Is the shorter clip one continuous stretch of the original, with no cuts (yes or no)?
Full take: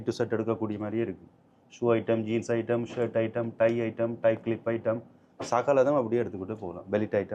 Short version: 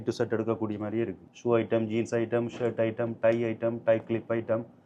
no